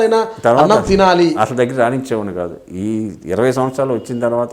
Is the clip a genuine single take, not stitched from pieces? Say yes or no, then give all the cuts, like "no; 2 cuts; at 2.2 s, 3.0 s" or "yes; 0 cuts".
yes; 0 cuts